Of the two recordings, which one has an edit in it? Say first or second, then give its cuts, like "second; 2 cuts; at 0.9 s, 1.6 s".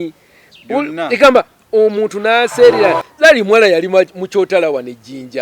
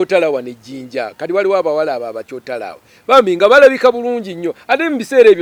first; 1 cut; at 3.0 s